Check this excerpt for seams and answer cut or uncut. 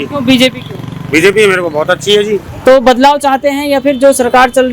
cut